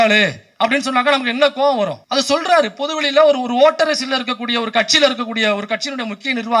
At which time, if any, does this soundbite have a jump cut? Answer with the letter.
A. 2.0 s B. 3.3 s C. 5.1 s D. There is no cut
A